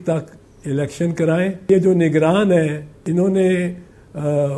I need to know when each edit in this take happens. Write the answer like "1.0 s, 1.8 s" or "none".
1.7 s, 2.9 s